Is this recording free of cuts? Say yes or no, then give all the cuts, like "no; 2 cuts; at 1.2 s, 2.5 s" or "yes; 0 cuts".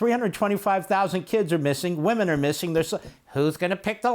yes; 0 cuts